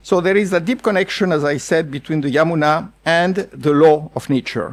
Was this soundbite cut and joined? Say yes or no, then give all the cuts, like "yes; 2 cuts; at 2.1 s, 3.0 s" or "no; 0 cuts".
no; 0 cuts